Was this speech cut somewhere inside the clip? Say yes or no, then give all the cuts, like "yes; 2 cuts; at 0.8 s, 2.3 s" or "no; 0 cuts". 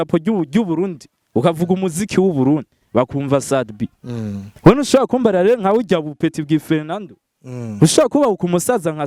no; 0 cuts